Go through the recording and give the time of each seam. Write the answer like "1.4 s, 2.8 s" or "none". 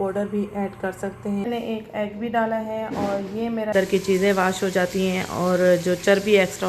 1.5 s, 3.7 s